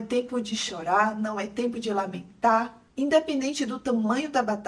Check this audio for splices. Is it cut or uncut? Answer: cut